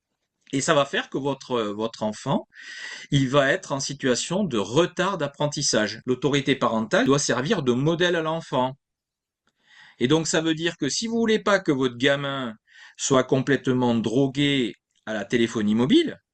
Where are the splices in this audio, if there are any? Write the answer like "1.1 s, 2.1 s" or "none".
6.0 s, 7.1 s